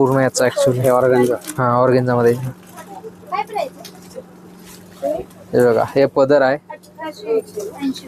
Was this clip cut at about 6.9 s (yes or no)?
no